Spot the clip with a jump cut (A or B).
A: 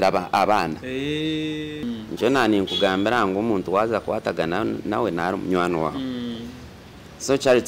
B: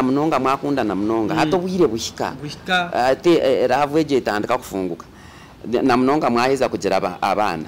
A